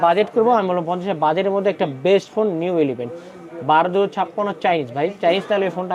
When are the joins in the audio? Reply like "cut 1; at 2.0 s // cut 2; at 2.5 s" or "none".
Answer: none